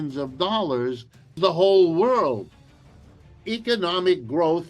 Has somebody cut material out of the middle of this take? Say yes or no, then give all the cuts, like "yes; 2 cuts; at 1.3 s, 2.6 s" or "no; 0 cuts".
yes; 1 cut; at 1.3 s